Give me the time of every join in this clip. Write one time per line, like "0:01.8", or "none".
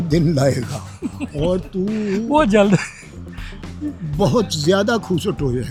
none